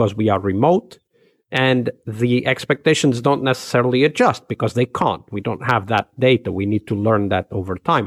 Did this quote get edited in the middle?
no; 0 cuts

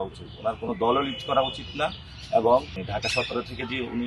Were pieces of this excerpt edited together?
yes; 1 cut; at 2.8 s

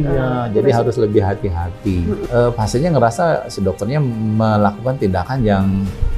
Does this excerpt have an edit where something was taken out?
yes; 1 cut; at 2.2 s

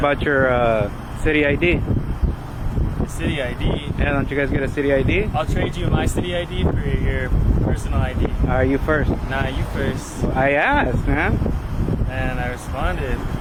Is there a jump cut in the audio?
no; 0 cuts

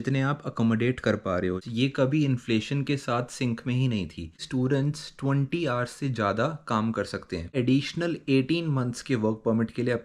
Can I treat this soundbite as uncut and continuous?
no; 3 cuts; at 1.7 s, 4.4 s, 7.5 s

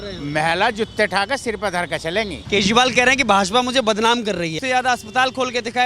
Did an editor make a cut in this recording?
yes; 2 cuts; at 2.4 s, 4.5 s

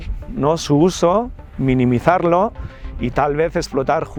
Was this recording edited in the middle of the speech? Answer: no; 0 cuts

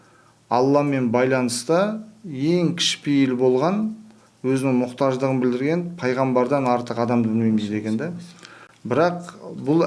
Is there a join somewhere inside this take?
no; 0 cuts

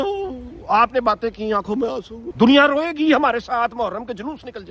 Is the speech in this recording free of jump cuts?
no; 1 cut; at 2.2 s

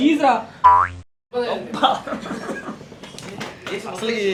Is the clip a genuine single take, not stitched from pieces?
yes; 0 cuts

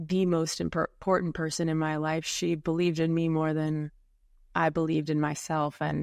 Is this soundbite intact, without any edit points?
yes; 0 cuts

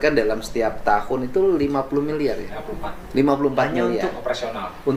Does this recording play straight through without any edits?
yes; 0 cuts

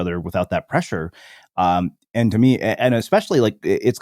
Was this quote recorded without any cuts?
yes; 0 cuts

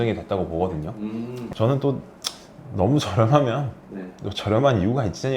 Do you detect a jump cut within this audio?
yes; 1 cut; at 1.5 s

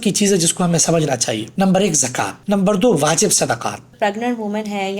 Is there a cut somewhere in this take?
yes; 3 cuts; at 1.5 s, 2.4 s, 3.9 s

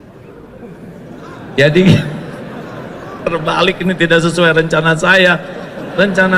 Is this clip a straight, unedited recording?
yes; 0 cuts

